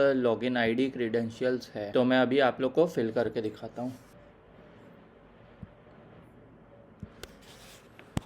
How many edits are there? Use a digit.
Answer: 2